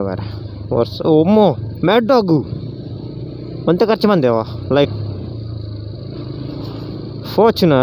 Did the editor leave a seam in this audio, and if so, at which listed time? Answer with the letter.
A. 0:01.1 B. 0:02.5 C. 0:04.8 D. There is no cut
C